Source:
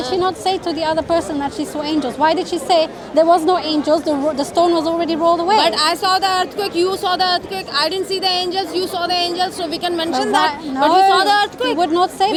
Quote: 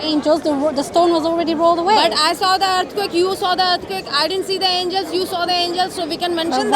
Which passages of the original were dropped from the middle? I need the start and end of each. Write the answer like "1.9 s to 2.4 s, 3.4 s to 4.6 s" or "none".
none